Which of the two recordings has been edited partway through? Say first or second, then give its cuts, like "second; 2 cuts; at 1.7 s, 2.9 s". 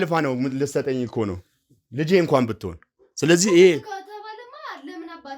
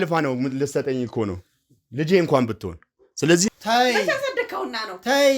second; 1 cut; at 3.5 s